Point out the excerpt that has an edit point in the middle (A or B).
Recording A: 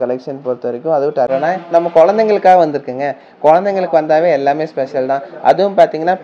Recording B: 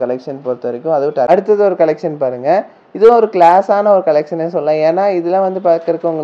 A